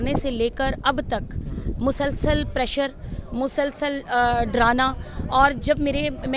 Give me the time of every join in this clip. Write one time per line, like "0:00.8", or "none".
none